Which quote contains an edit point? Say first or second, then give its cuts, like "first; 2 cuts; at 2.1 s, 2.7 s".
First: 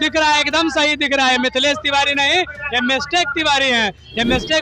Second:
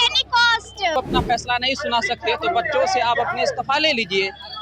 second; 1 cut; at 0.9 s